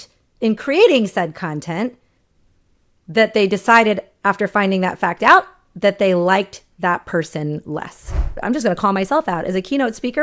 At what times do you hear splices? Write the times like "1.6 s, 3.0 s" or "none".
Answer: 8.3 s